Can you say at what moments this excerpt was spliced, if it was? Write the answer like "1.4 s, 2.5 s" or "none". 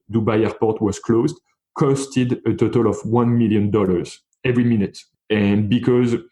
5.0 s